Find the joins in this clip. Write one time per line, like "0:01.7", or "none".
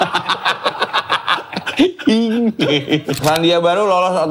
0:03.2